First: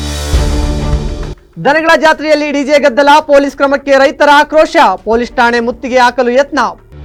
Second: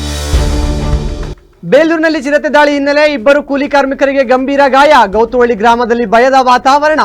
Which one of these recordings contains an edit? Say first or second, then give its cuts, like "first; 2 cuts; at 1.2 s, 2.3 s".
second; 1 cut; at 1.4 s